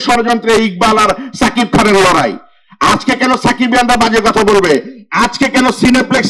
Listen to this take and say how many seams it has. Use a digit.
0